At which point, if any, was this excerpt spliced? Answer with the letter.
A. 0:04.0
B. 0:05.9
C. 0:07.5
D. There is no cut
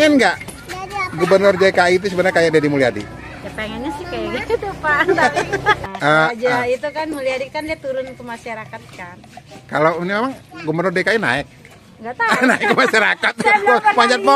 B